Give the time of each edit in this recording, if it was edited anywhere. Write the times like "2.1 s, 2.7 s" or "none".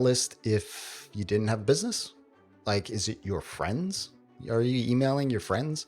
2.6 s